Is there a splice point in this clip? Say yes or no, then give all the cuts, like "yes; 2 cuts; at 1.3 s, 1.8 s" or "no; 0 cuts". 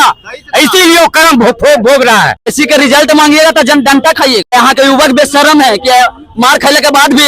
yes; 2 cuts; at 2.4 s, 4.5 s